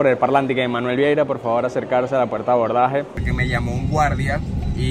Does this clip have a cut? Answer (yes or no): yes